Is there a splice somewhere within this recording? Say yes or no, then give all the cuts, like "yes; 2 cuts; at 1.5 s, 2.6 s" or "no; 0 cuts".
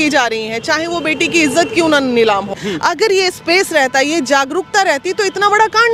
yes; 1 cut; at 2.6 s